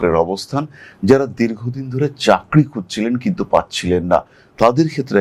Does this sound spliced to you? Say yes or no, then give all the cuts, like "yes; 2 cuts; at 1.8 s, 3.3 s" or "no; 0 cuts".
no; 0 cuts